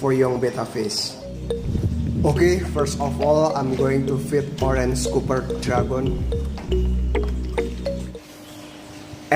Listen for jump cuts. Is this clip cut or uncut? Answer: cut